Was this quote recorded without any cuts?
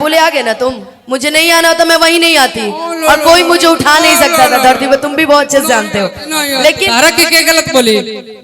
no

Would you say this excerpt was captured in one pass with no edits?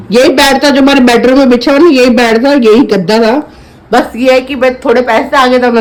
yes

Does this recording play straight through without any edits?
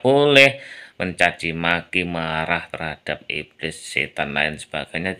yes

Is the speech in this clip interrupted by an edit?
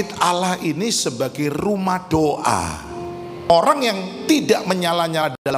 yes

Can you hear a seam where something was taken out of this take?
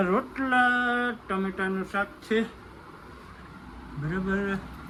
no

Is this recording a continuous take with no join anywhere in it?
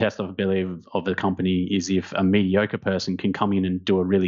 yes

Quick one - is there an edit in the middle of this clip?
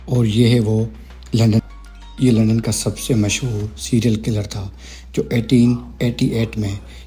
yes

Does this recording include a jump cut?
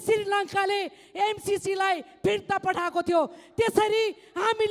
no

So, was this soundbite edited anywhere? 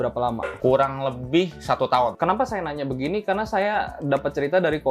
no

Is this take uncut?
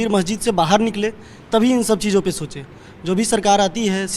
yes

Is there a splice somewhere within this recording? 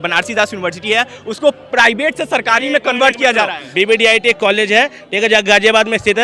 yes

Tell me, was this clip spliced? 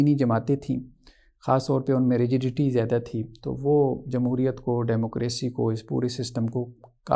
no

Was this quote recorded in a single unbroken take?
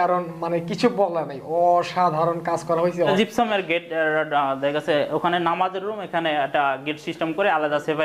no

